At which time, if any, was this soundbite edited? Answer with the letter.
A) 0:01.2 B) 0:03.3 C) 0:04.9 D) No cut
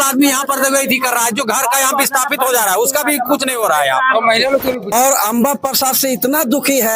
C